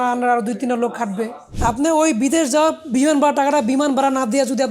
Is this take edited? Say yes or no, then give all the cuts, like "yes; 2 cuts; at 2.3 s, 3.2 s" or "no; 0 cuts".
yes; 1 cut; at 1.4 s